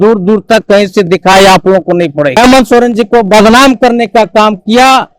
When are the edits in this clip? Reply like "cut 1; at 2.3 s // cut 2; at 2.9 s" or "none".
cut 1; at 2.4 s